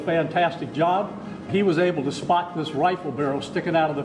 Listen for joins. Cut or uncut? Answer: cut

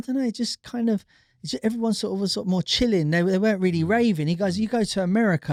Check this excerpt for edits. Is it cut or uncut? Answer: uncut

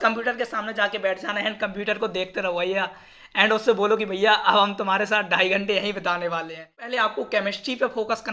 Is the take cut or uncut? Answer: cut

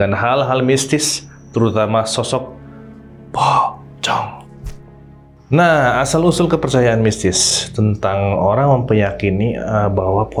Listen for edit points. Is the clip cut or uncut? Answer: uncut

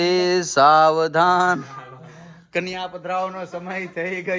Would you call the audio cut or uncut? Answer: uncut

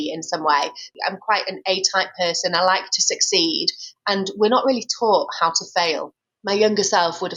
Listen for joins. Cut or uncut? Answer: cut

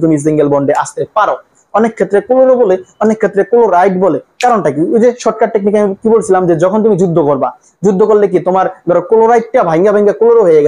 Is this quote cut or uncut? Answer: cut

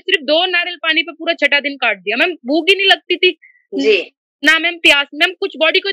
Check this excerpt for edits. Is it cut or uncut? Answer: uncut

